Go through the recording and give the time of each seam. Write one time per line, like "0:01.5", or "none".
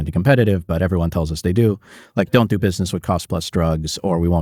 none